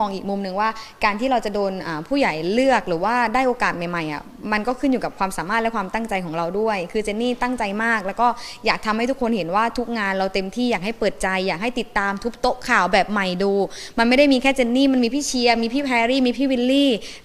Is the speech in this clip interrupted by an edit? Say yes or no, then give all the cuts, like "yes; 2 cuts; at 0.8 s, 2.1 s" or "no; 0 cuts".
no; 0 cuts